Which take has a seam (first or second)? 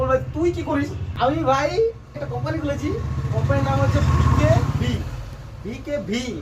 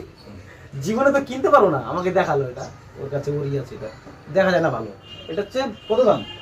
first